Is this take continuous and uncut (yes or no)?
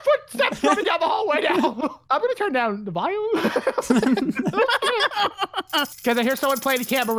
yes